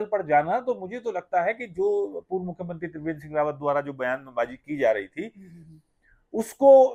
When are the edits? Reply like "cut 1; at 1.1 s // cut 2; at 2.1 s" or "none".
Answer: none

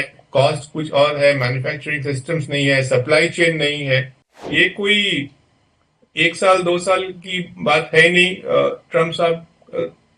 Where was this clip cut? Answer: cut 1; at 4.4 s

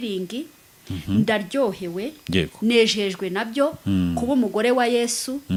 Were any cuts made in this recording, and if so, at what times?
none

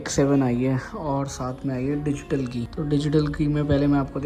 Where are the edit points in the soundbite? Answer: cut 1; at 2.7 s

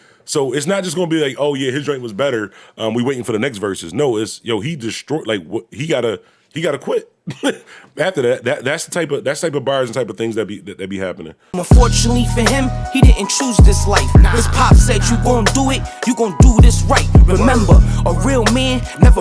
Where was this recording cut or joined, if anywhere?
cut 1; at 11.5 s

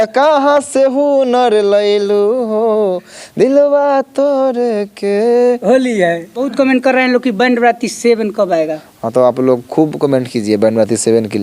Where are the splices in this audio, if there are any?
cut 1; at 6.5 s

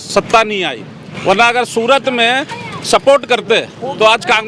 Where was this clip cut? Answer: none

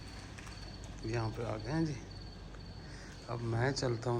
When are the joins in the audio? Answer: none

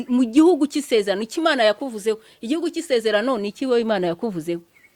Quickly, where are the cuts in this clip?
none

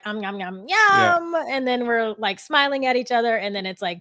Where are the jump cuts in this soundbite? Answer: none

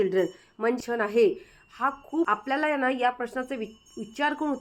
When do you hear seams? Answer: cut 1; at 0.8 s // cut 2; at 2.3 s

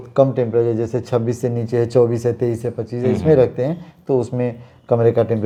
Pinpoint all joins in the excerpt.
none

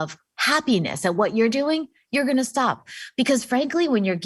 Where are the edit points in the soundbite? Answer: cut 1; at 2.8 s

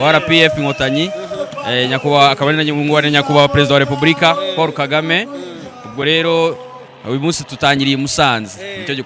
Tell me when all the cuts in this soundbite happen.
none

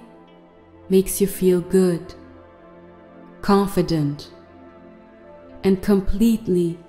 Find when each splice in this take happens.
cut 1; at 2.1 s // cut 2; at 3.4 s // cut 3; at 4.2 s // cut 4; at 5.6 s

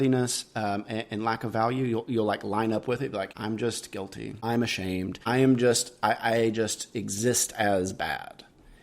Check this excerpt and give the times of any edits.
cut 1; at 3.3 s // cut 2; at 4.3 s

